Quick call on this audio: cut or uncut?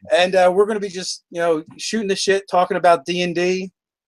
uncut